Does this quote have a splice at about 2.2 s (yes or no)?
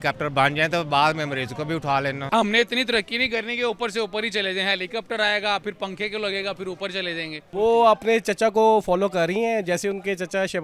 yes